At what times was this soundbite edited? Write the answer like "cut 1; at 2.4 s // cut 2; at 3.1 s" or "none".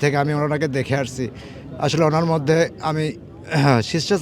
none